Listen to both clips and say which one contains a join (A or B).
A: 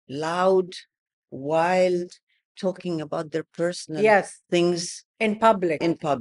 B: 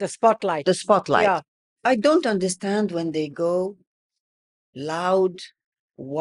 B